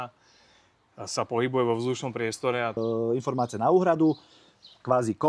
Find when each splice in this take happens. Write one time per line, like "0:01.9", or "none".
0:02.8